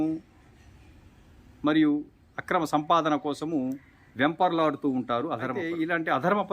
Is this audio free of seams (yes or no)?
no